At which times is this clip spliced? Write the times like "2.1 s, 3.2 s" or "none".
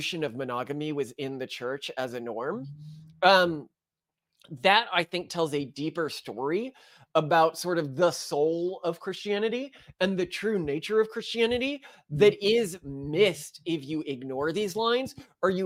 none